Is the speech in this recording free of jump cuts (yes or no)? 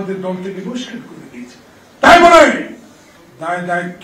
yes